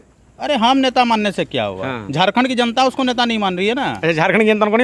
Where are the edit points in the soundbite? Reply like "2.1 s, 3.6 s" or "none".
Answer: none